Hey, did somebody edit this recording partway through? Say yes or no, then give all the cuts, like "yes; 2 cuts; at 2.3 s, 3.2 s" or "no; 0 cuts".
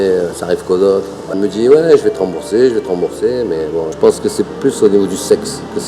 yes; 2 cuts; at 1.2 s, 3.9 s